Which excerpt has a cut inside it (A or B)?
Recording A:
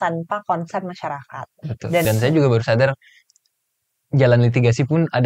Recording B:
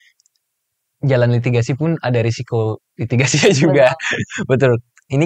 A